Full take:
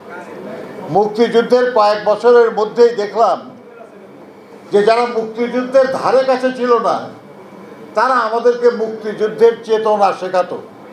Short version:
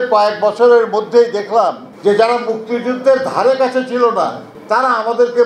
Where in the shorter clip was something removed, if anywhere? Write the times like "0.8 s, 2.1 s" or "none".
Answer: 1.9 s, 4.5 s